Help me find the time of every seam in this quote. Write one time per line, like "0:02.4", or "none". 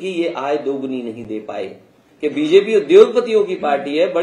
0:02.0